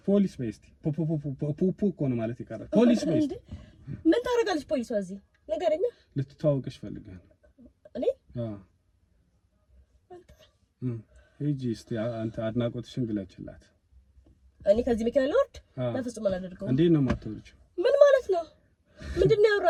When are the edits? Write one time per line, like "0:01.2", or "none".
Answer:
none